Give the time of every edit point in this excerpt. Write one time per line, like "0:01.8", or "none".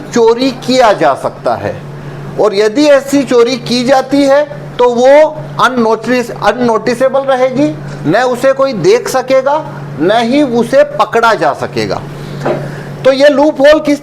none